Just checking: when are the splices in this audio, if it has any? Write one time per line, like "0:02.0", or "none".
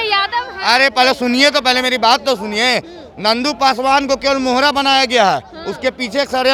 none